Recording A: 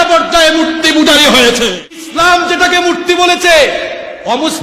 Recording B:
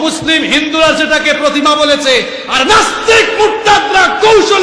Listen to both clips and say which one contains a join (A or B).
A